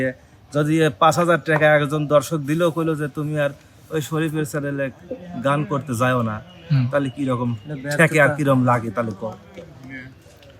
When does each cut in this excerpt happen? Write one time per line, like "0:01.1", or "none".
none